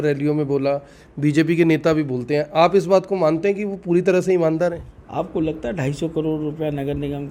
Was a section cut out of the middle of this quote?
yes; 1 cut; at 4.9 s

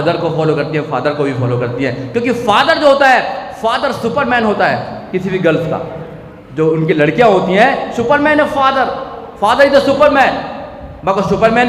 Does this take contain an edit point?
no; 0 cuts

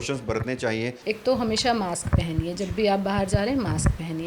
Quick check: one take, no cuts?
no; 1 cut; at 0.9 s

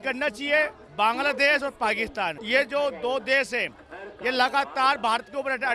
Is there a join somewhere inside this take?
yes; 1 cut; at 2.4 s

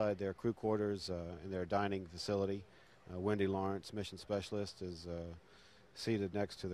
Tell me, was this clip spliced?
no; 0 cuts

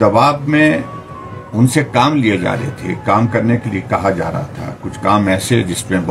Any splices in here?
no; 0 cuts

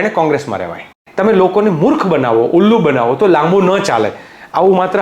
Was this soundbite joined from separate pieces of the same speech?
yes; 1 cut; at 0.9 s

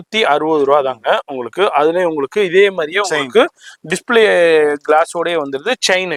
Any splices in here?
no; 0 cuts

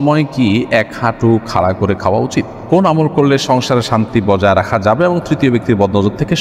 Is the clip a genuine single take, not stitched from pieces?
no; 1 cut; at 2.5 s

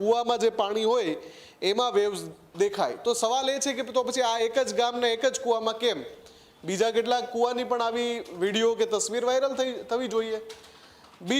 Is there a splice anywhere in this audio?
no; 0 cuts

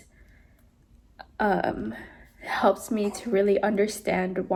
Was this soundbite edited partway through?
no; 0 cuts

